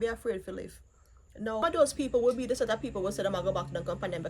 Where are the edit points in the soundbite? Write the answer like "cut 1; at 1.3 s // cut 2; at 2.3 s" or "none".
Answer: cut 1; at 1.6 s